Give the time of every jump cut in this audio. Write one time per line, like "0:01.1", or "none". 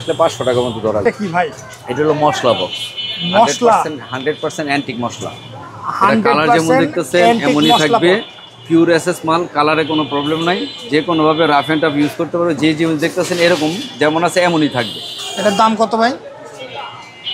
0:01.0